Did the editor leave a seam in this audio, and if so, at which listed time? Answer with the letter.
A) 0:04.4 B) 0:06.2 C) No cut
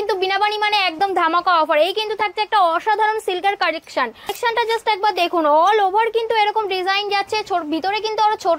A